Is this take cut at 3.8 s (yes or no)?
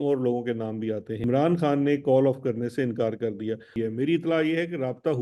yes